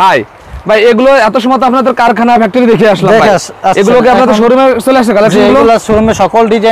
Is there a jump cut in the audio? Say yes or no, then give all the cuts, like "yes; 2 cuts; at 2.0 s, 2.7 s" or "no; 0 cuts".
no; 0 cuts